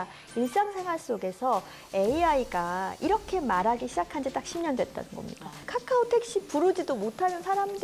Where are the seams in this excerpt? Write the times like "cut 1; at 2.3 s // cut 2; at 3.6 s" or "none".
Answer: cut 1; at 5.6 s

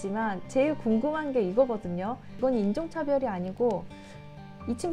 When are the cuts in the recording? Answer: none

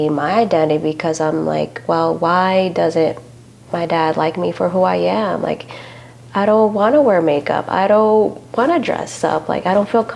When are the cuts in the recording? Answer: none

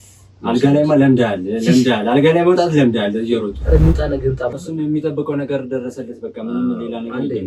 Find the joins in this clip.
cut 1; at 4.5 s

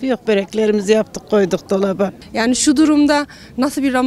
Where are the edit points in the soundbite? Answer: cut 1; at 2.2 s

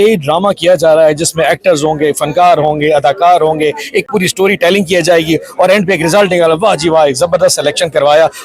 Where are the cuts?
none

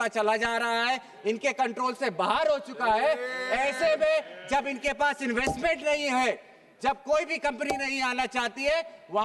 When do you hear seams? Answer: none

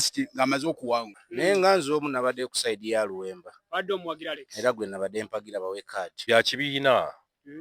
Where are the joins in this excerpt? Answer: cut 1; at 1.2 s // cut 2; at 6.2 s

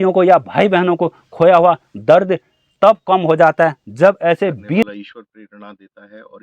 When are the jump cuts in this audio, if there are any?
cut 1; at 4.8 s

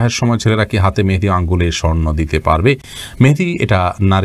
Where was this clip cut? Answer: none

